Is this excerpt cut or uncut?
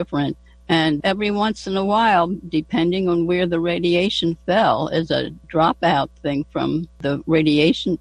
cut